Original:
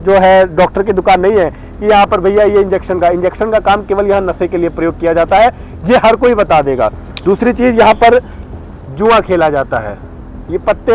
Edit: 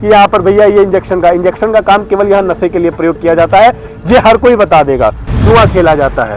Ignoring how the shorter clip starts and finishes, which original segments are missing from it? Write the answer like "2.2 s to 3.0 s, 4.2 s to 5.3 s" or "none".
7.1 s to 8.8 s